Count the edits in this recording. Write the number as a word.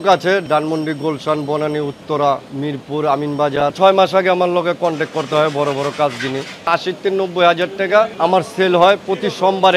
two